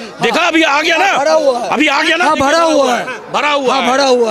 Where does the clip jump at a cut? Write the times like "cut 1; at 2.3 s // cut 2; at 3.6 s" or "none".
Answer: none